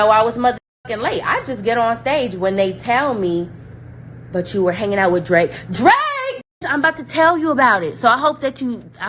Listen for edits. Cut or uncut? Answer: uncut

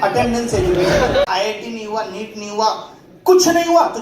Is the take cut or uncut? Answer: cut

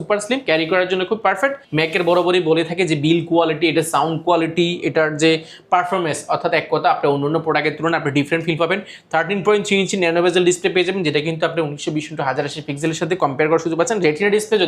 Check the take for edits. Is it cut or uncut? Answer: cut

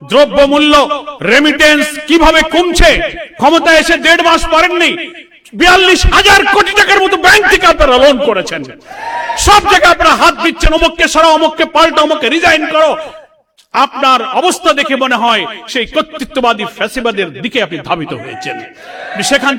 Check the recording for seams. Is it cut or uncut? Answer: uncut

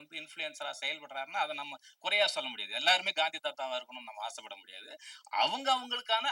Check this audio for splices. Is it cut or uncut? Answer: uncut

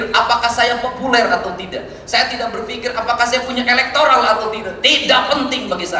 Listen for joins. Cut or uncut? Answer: uncut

